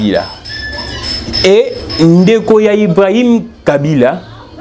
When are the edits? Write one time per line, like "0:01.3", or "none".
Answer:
none